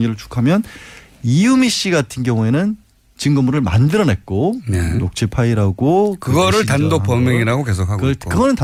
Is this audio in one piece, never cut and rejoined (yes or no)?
yes